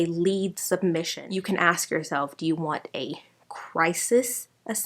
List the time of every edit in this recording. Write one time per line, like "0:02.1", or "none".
0:01.2